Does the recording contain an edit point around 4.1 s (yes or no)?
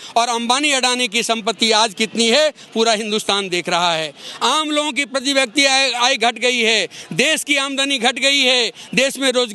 no